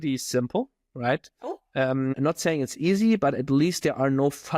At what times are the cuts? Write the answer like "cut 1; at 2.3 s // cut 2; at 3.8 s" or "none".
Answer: cut 1; at 2.1 s